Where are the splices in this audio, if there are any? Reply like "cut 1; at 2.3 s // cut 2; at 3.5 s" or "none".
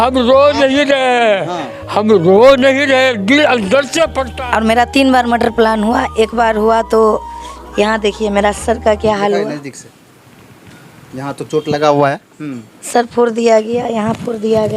cut 1; at 4.3 s